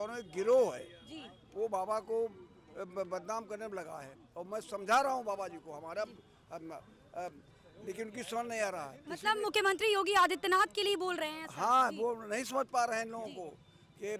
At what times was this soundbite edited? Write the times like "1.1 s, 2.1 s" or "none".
none